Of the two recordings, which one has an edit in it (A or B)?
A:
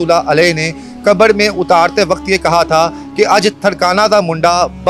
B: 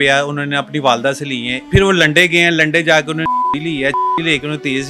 B